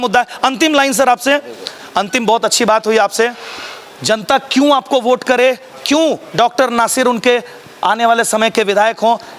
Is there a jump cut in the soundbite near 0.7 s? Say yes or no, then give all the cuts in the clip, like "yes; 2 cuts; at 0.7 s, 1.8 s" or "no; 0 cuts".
no; 0 cuts